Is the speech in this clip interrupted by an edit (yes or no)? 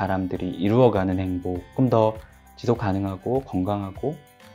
yes